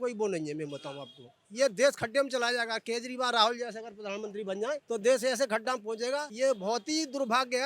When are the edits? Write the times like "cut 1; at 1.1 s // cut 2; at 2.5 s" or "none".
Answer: cut 1; at 4.8 s // cut 2; at 6.3 s